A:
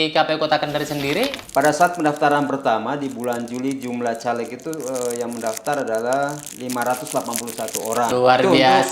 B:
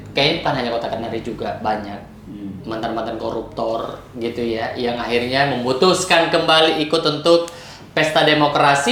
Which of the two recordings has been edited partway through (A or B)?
A